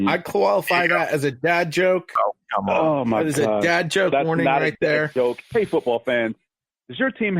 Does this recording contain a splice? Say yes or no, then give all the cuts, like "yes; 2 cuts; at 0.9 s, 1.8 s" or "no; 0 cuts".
yes; 1 cut; at 5.4 s